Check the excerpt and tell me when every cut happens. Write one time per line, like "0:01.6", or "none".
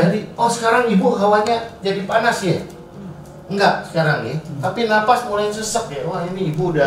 none